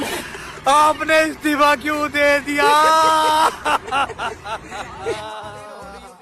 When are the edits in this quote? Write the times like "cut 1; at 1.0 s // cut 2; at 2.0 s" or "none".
none